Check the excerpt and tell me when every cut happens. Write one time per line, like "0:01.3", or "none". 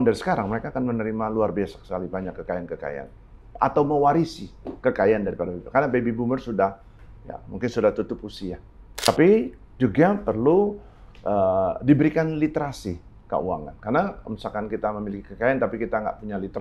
0:09.1